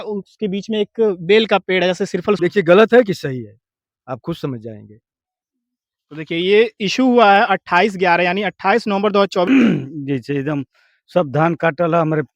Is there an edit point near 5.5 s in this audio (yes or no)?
no